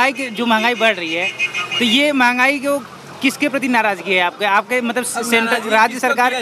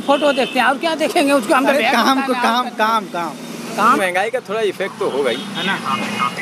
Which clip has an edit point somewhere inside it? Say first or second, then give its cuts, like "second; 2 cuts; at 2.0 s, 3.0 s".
second; 1 cut; at 4.0 s